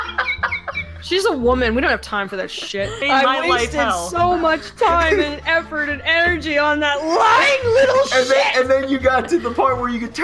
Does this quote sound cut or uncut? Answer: cut